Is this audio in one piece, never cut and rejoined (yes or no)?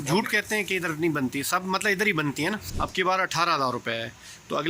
no